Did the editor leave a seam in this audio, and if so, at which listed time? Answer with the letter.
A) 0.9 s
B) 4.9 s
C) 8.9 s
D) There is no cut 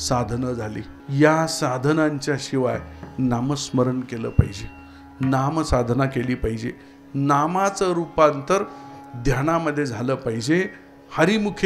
A